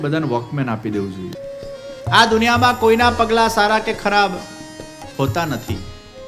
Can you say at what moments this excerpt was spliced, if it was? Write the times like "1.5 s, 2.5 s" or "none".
1.3 s